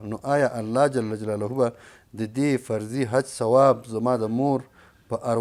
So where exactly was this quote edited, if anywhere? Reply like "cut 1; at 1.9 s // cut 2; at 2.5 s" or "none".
none